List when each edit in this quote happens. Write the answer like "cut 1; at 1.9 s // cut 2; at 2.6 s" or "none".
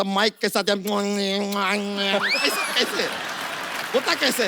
none